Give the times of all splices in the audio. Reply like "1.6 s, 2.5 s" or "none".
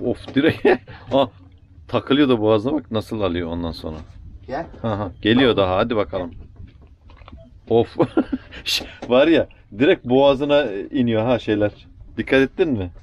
none